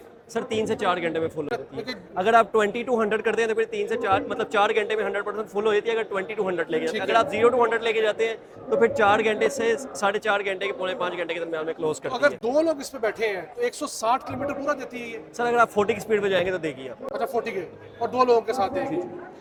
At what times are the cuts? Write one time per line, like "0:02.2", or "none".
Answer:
none